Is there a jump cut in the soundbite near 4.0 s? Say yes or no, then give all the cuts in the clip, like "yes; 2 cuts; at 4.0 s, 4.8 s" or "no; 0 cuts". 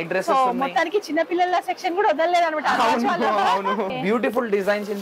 yes; 1 cut; at 4.0 s